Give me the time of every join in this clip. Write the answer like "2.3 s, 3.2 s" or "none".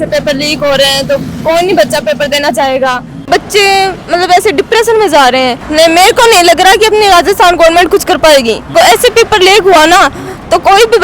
3.1 s, 5.6 s, 8.7 s